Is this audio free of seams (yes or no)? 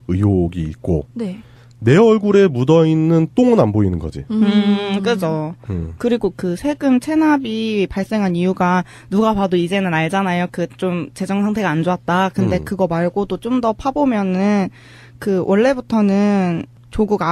yes